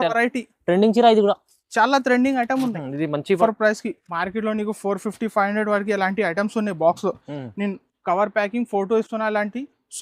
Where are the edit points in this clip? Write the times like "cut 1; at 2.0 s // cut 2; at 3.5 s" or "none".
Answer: cut 1; at 3.4 s